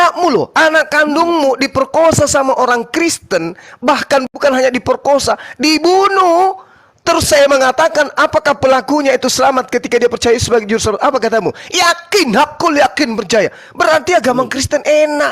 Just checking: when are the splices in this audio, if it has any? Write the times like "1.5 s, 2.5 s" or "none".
4.3 s